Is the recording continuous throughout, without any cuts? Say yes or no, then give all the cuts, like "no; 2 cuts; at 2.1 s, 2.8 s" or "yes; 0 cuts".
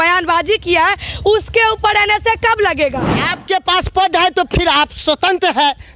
no; 1 cut; at 3.2 s